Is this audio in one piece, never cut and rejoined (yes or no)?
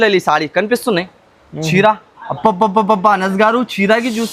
yes